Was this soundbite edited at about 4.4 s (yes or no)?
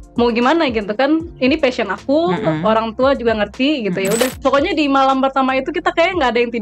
yes